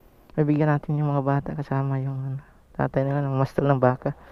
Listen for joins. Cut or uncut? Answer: uncut